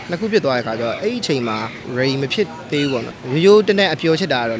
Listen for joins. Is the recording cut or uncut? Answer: cut